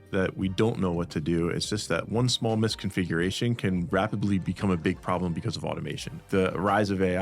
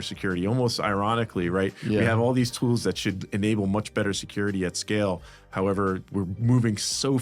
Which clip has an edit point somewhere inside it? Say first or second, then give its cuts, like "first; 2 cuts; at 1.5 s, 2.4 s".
first; 1 cut; at 6.2 s